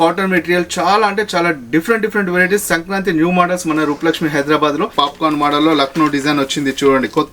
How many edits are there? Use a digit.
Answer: 1